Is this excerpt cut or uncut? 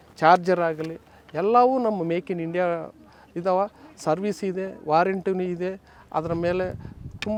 uncut